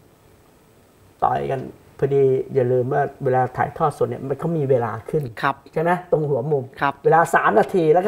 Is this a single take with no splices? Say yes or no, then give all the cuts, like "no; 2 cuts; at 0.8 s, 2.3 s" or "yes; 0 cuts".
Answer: yes; 0 cuts